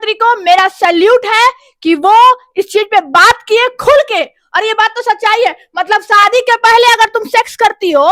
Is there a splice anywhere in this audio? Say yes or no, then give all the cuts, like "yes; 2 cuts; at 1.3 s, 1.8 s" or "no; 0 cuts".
no; 0 cuts